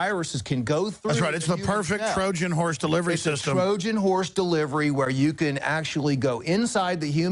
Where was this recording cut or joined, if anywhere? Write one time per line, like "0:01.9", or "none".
none